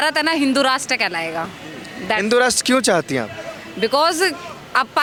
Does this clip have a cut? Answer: no; 0 cuts

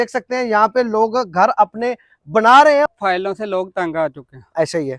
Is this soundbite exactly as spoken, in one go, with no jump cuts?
no; 1 cut; at 2.9 s

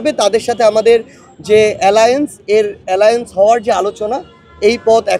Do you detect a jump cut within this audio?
no; 0 cuts

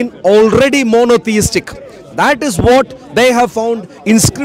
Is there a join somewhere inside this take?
no; 0 cuts

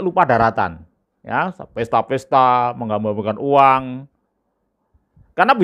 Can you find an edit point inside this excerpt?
no; 0 cuts

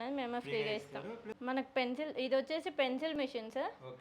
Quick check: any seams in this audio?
yes; 1 cut; at 1.3 s

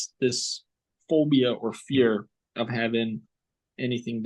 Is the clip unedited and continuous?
yes; 0 cuts

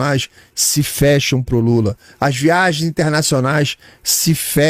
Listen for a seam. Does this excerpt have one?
no; 0 cuts

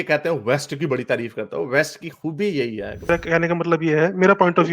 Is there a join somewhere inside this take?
yes; 1 cut; at 3.1 s

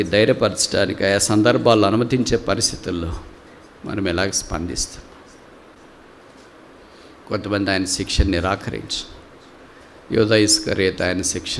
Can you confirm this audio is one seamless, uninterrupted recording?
yes; 0 cuts

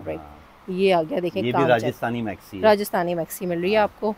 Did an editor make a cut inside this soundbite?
no; 0 cuts

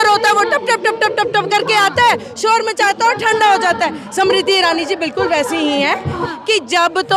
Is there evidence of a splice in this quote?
yes; 1 cut; at 6.2 s

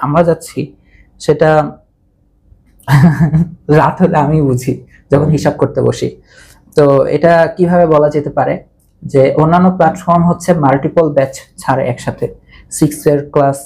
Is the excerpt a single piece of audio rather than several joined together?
yes; 0 cuts

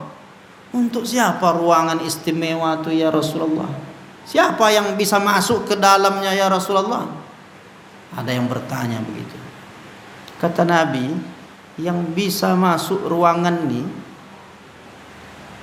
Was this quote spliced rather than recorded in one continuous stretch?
no; 0 cuts

